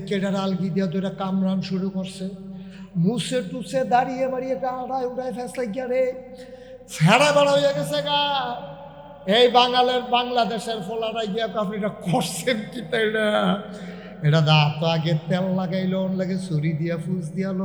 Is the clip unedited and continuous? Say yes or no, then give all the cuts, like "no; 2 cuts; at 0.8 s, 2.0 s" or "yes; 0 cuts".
yes; 0 cuts